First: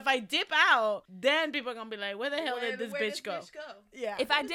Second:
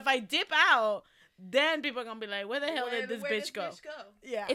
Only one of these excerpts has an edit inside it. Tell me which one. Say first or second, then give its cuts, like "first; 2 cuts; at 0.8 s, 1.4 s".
first; 1 cut; at 1.1 s